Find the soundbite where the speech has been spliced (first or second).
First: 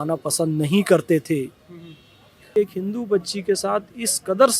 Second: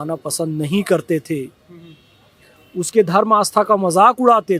first